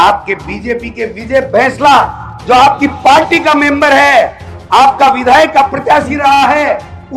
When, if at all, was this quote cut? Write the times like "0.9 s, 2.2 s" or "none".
none